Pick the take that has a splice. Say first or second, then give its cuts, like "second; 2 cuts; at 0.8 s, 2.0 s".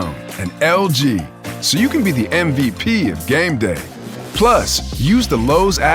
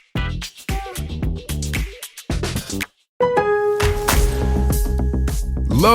second; 1 cut; at 3.1 s